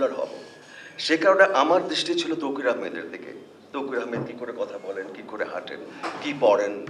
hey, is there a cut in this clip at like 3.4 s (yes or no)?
no